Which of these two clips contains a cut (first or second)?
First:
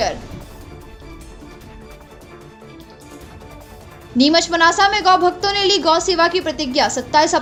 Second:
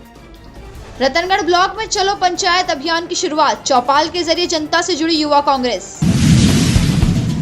second